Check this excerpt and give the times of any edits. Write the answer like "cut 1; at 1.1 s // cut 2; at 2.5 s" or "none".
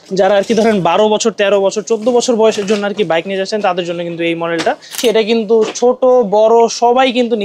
cut 1; at 4.9 s